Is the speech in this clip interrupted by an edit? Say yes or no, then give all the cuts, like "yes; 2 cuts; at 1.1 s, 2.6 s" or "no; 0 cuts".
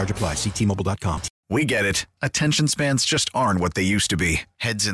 yes; 1 cut; at 1.3 s